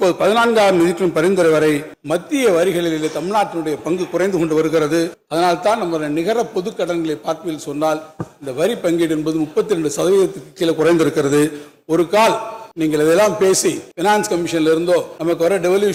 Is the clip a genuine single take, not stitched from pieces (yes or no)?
yes